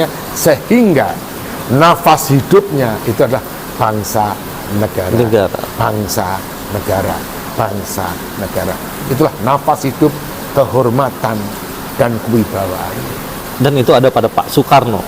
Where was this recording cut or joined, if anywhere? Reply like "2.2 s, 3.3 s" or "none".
13.4 s